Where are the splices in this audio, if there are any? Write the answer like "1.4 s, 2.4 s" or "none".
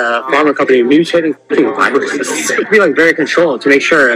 2.7 s